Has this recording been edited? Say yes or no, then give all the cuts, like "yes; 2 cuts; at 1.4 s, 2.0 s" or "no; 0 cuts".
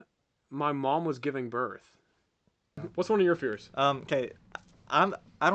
yes; 1 cut; at 2.8 s